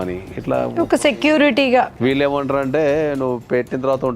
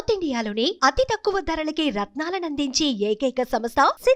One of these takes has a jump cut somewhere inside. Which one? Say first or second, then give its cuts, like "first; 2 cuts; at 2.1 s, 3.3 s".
first; 1 cut; at 1.9 s